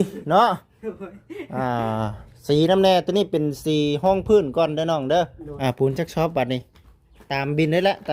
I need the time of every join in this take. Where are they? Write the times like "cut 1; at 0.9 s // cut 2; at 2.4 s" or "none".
cut 1; at 5.4 s